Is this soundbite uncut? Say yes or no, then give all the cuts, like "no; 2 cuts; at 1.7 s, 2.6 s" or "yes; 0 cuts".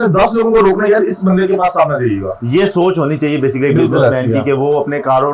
yes; 0 cuts